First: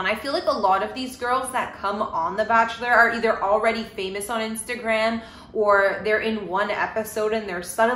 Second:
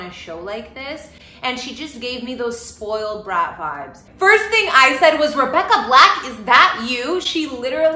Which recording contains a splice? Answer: second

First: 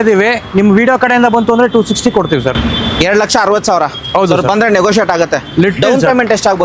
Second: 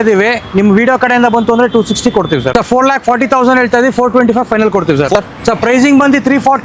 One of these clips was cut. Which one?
second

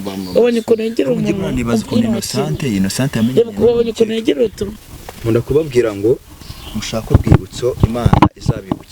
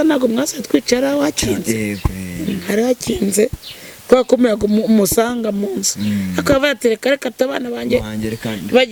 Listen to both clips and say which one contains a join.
first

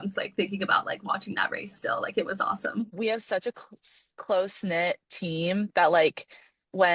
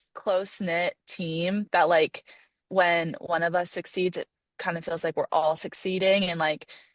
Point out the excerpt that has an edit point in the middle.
first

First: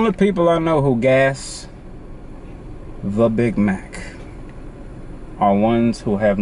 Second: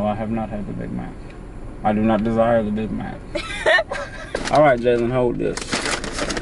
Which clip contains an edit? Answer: second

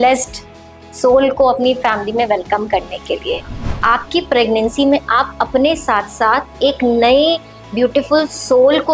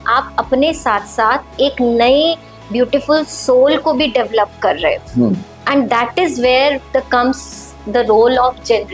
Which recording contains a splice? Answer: first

